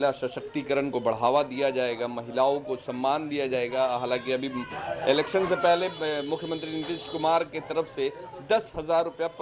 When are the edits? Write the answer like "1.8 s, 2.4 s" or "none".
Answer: none